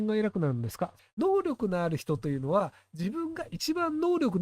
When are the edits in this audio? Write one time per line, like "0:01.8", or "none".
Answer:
0:01.0